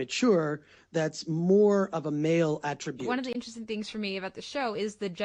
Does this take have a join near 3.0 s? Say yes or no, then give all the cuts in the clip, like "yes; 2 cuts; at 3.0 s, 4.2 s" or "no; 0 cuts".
yes; 1 cut; at 3.0 s